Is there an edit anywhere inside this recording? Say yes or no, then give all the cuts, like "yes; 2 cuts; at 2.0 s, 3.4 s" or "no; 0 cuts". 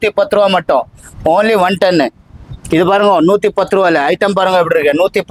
no; 0 cuts